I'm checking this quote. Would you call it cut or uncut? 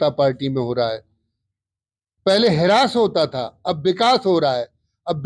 uncut